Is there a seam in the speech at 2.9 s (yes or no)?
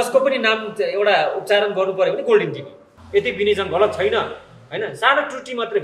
yes